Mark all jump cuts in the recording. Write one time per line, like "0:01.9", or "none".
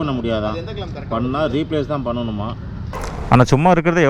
0:02.9